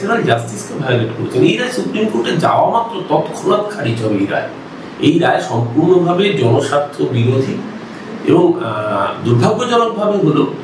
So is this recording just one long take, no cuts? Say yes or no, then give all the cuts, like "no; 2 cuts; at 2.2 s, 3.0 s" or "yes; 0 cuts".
yes; 0 cuts